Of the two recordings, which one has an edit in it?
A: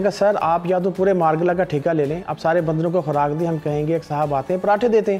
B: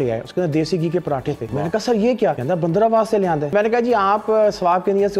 B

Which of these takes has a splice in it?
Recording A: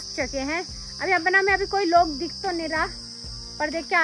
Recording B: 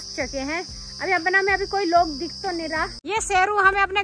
B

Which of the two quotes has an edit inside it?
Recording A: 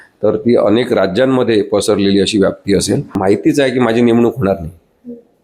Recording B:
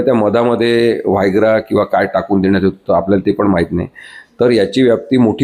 A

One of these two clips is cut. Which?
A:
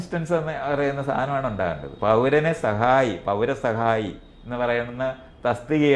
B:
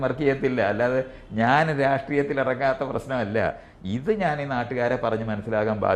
A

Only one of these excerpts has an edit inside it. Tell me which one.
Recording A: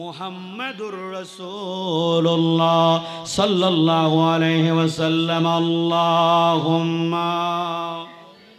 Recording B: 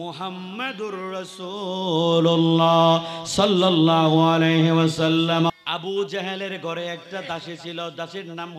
B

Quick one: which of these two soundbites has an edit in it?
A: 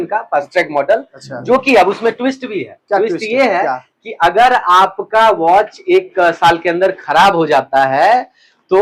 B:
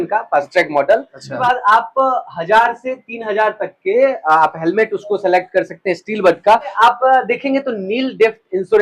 B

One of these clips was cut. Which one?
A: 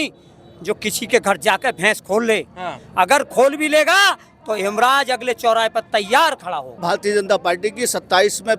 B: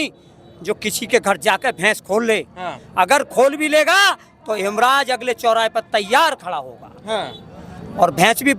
A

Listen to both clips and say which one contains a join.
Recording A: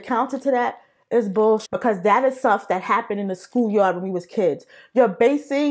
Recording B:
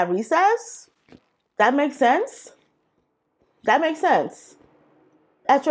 A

